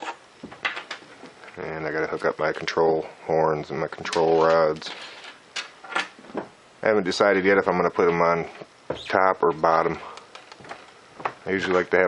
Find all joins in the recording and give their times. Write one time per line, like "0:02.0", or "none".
0:02.2